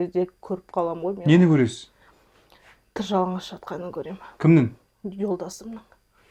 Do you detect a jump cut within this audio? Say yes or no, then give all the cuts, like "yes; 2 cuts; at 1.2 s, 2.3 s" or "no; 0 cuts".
no; 0 cuts